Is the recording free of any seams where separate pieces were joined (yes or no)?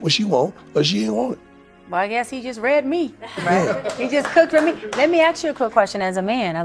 yes